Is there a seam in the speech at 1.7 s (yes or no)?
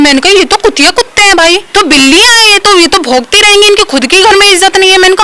yes